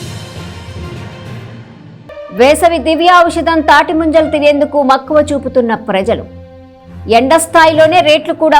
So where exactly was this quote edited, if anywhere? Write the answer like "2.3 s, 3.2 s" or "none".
2.2 s